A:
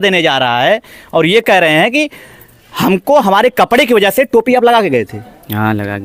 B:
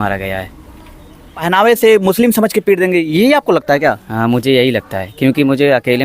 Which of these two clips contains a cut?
B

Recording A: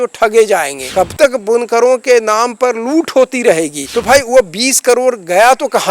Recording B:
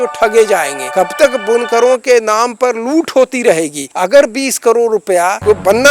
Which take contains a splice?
A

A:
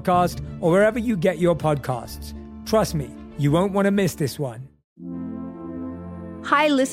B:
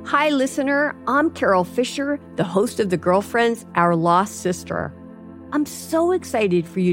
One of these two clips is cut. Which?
A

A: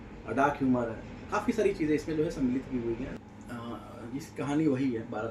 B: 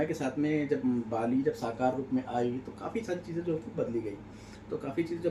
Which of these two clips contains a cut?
A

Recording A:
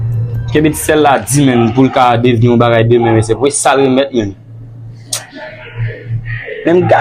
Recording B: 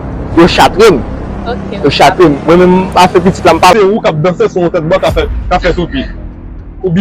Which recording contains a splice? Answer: B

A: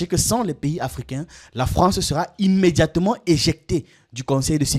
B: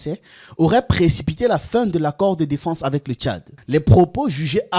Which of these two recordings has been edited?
B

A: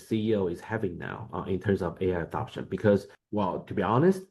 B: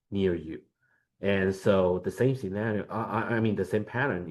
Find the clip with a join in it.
A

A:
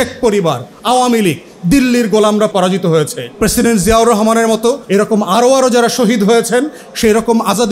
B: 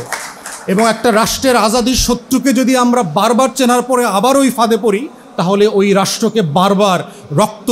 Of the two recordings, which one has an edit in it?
A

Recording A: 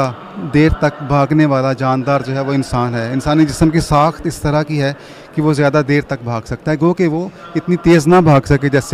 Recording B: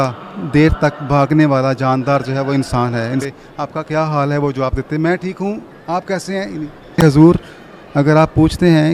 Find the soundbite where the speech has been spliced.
B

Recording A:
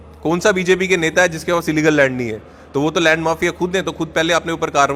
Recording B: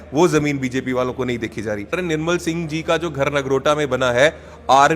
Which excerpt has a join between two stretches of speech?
B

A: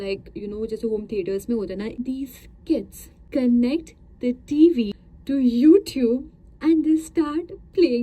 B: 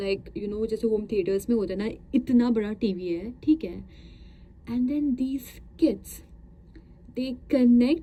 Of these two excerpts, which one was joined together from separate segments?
A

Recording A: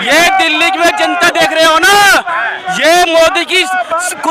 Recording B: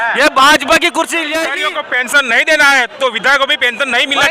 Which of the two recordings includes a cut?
B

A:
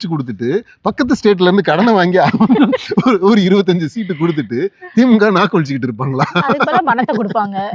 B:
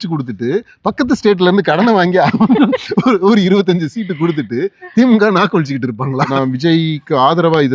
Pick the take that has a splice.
B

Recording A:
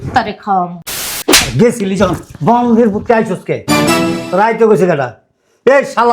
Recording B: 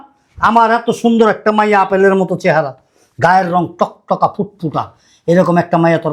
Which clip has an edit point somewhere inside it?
A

